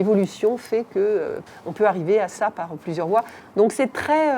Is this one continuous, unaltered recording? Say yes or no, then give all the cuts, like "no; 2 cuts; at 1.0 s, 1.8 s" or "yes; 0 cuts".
no; 2 cuts; at 1.4 s, 3.4 s